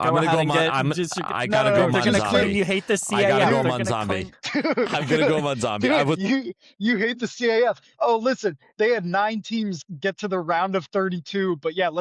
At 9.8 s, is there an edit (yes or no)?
yes